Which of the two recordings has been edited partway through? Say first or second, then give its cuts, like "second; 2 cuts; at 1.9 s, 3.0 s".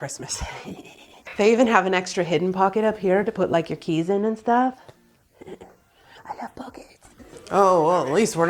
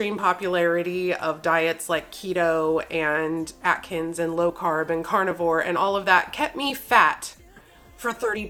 first; 2 cuts; at 1.2 s, 7.2 s